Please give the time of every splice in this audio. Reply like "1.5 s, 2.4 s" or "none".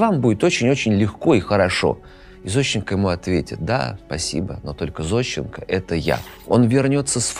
6.4 s

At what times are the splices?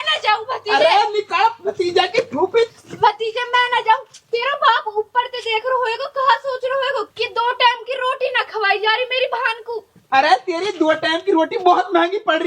2.7 s

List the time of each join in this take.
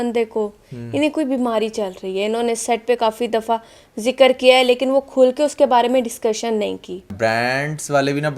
7.1 s

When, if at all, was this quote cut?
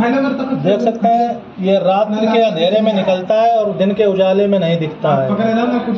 none

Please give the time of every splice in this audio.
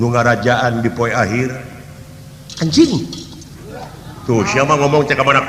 none

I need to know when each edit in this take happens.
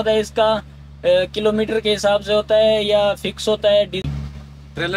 4.0 s

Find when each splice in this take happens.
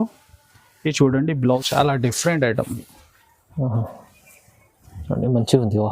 1.4 s

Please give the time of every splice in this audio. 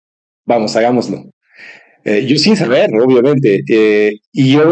none

